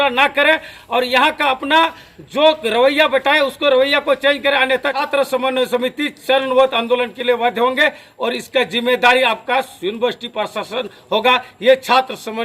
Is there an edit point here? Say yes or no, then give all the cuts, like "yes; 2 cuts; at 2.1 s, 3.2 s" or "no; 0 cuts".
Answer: yes; 1 cut; at 5.0 s